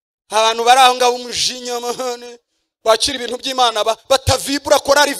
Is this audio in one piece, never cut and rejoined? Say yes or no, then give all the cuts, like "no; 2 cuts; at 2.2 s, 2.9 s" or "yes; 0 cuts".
yes; 0 cuts